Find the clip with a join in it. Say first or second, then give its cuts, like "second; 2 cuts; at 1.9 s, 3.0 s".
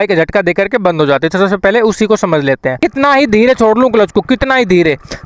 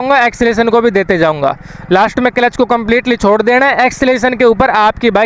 first; 1 cut; at 2.8 s